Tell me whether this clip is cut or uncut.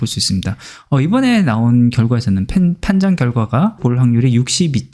cut